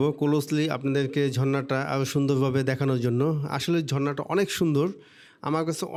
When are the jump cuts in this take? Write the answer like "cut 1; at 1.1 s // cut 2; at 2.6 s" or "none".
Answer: none